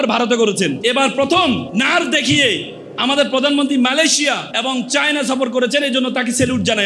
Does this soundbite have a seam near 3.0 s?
no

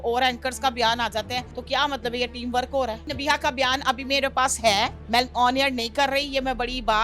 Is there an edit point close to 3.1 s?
yes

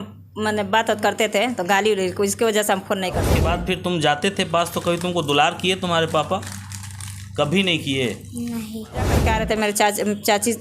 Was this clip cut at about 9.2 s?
yes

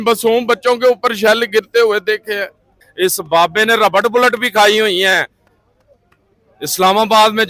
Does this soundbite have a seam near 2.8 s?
yes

